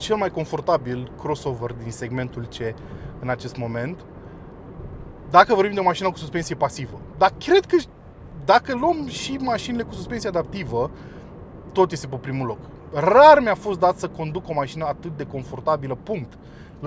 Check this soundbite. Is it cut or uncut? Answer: uncut